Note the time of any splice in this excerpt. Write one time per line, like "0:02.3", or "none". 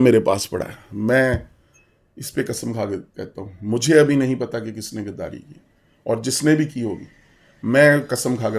none